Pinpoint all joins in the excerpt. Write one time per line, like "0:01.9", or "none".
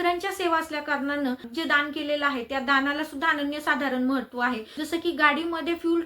0:01.3
0:04.7